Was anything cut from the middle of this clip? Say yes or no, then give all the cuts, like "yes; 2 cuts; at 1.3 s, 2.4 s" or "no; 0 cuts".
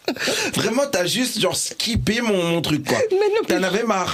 no; 0 cuts